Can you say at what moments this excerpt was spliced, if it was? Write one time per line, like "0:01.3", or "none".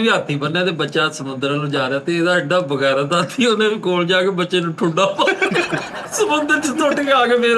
none